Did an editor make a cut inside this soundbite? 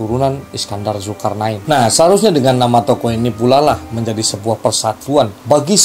yes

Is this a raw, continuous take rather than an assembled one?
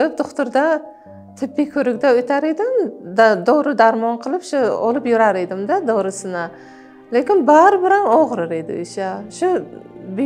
yes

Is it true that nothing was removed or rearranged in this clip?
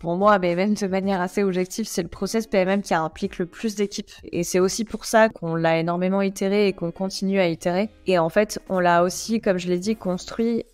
yes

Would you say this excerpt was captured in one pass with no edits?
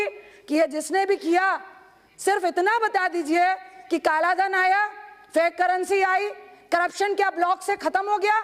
yes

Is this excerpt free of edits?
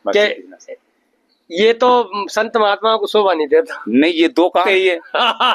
no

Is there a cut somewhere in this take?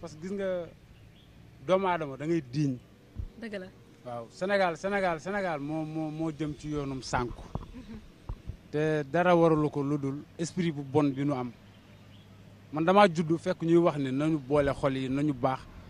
yes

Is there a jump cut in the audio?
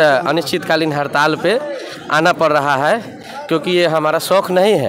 no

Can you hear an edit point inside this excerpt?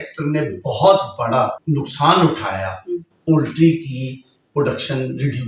yes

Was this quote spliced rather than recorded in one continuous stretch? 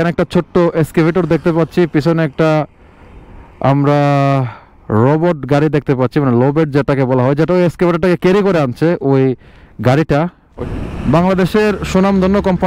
yes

